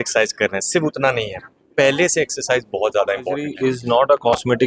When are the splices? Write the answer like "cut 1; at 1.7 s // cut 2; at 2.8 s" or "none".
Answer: cut 1; at 3.5 s